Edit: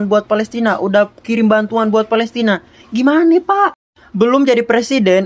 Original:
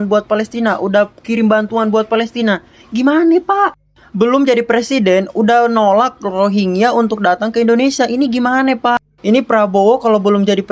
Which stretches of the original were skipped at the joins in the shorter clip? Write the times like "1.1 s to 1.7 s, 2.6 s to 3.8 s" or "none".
none